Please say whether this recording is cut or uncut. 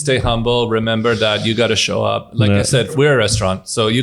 cut